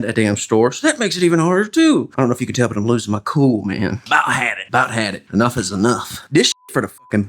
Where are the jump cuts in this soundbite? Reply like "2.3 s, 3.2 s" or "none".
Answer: 4.0 s, 6.2 s